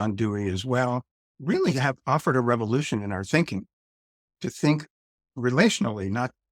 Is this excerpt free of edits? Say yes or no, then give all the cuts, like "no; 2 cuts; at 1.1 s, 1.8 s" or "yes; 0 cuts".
yes; 0 cuts